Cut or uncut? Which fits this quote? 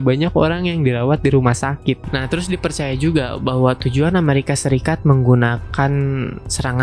cut